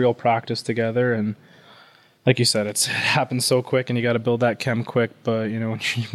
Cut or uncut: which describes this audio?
uncut